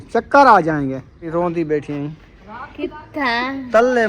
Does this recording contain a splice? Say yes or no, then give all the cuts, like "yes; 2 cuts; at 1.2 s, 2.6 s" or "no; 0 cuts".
yes; 1 cut; at 1.3 s